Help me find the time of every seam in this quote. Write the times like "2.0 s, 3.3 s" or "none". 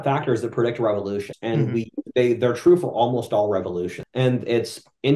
1.3 s, 4.0 s